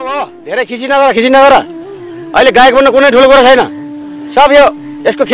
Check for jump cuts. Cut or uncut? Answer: uncut